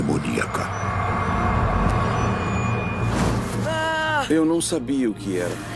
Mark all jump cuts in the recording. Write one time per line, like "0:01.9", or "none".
none